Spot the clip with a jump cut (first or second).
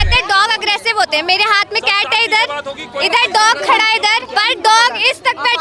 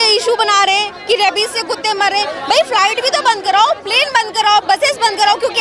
first